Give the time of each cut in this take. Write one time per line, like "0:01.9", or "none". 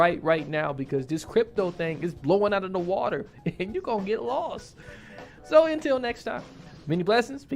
none